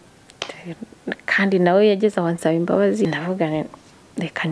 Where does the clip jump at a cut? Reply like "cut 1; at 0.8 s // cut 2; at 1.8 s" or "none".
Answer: cut 1; at 3.0 s